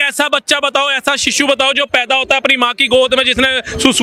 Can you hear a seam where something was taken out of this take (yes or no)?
no